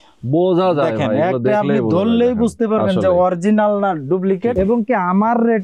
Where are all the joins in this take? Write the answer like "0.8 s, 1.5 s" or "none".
4.5 s

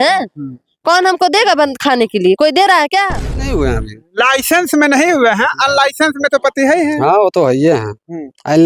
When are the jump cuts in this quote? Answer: 3.5 s

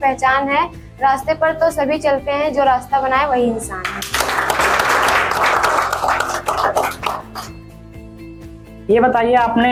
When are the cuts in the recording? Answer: none

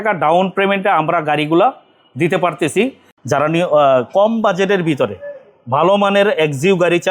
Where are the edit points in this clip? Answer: 3.1 s

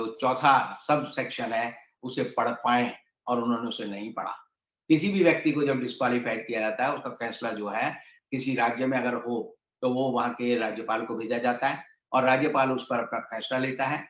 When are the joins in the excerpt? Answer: none

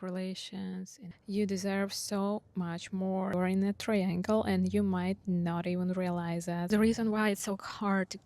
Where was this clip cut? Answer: 1.0 s, 3.3 s, 6.7 s

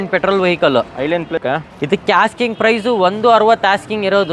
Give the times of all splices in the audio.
1.4 s

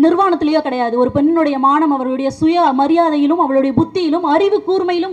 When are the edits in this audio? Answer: none

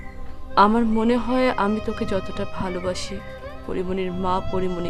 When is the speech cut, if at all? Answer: none

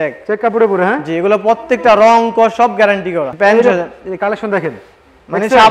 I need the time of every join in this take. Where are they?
3.3 s

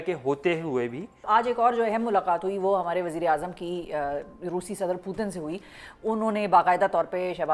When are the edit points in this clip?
1.2 s

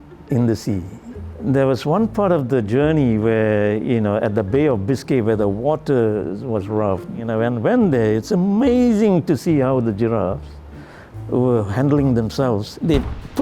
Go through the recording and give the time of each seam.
7.2 s

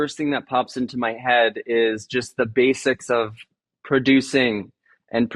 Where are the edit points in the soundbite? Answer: none

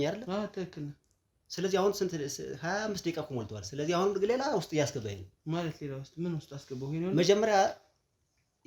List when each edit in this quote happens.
none

